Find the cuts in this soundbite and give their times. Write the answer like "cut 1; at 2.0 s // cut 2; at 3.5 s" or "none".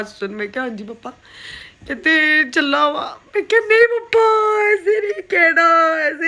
none